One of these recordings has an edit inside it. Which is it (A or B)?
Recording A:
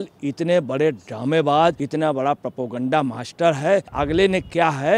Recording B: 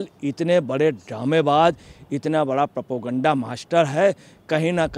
A